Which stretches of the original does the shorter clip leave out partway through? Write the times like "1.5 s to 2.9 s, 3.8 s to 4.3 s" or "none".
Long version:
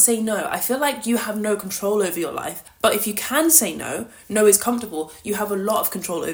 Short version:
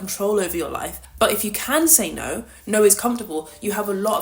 none

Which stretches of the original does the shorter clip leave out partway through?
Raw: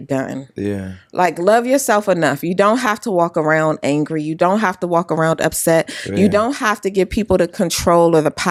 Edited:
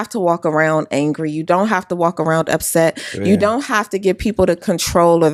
none

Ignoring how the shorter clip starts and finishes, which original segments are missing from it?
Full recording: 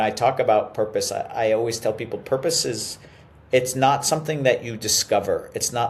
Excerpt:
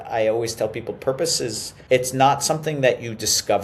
2.9 s to 3.3 s

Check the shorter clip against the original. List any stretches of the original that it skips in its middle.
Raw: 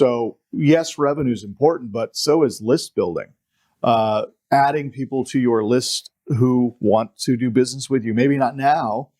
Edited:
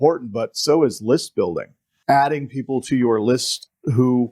3.5 s to 4.3 s

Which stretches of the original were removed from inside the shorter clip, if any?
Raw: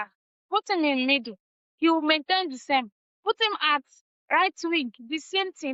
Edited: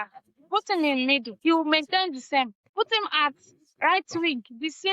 1.3 s to 1.7 s, 3.0 s to 3.1 s

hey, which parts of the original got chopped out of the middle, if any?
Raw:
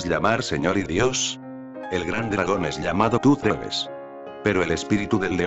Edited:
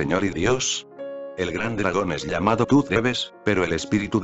3.4 s to 3.9 s

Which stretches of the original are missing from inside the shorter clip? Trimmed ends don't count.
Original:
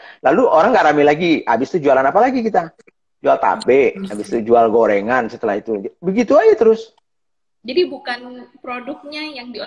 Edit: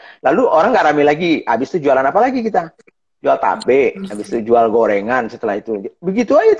none

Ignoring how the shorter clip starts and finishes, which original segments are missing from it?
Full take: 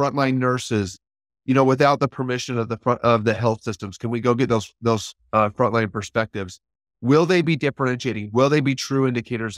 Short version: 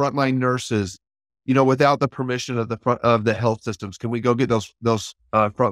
none

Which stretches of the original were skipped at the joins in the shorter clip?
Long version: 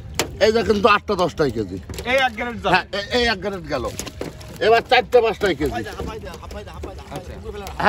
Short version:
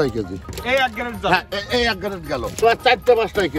4.0 s to 4.7 s

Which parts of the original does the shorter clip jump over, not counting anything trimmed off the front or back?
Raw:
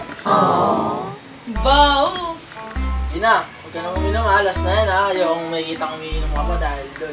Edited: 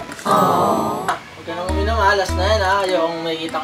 1.3 s to 3.6 s

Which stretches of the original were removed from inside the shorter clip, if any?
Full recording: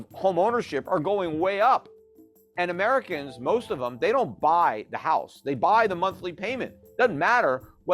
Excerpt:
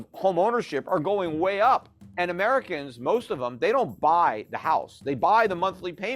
2.0 s to 2.4 s

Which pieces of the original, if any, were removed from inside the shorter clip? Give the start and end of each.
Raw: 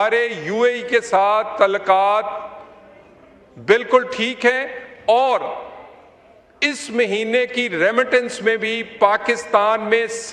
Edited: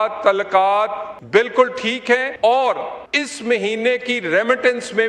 2.4 s to 3.4 s, 4.6 s to 4.9 s, 5.6 s to 6.5 s

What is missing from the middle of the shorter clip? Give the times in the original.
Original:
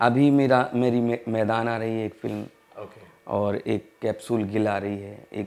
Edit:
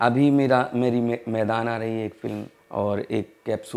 2.5 s to 3.1 s

